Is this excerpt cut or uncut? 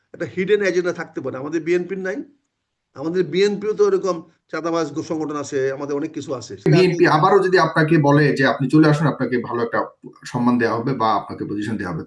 cut